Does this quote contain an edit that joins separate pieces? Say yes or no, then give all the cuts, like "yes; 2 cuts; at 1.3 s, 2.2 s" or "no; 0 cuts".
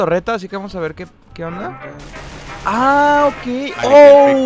no; 0 cuts